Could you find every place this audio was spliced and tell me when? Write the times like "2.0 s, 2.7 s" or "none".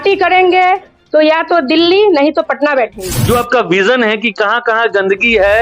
3.1 s